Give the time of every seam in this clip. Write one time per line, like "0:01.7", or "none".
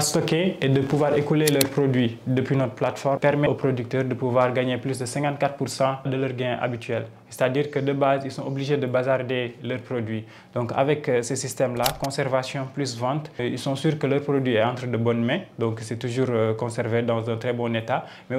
0:03.5
0:06.1
0:13.4